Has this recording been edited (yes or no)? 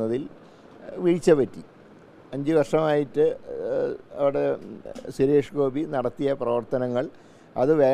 no